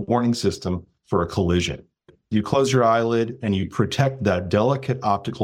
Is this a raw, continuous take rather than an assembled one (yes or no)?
no